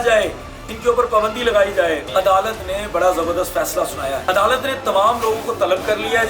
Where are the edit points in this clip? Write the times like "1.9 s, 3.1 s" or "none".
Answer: 2.0 s, 4.2 s